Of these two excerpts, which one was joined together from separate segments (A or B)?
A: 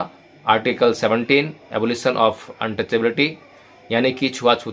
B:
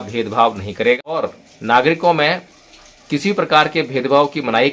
B